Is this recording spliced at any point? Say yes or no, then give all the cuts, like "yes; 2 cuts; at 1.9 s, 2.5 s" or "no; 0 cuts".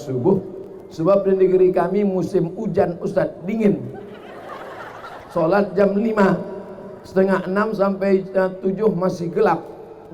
no; 0 cuts